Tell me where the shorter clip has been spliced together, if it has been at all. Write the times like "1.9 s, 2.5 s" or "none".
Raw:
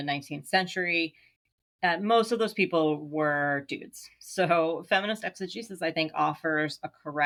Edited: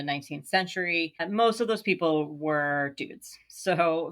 1.2 s